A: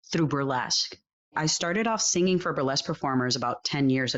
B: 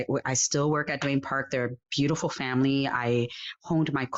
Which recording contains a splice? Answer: A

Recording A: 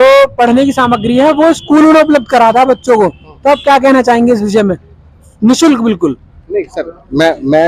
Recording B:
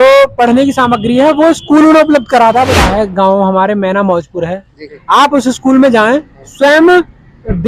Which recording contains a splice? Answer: B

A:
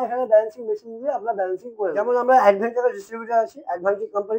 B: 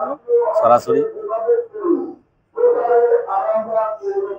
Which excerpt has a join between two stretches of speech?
A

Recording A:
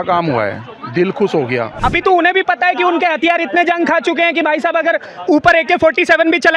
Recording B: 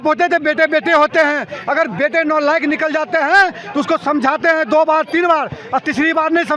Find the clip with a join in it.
A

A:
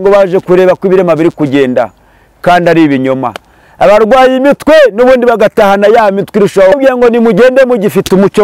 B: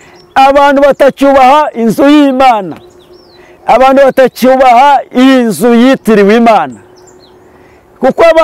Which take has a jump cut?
A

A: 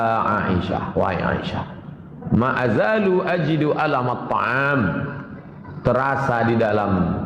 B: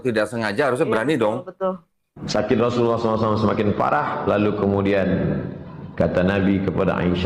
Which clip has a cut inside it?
B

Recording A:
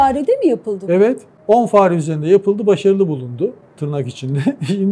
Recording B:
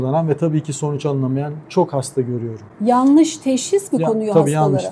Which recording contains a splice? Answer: A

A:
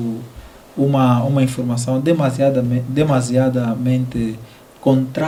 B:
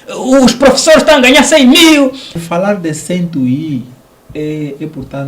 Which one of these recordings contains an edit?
B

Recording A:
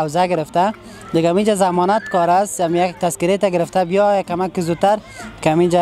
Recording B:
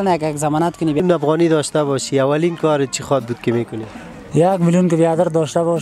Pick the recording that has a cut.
B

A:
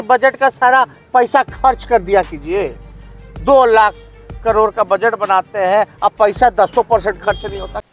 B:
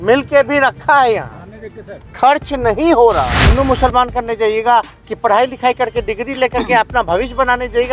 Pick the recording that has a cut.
B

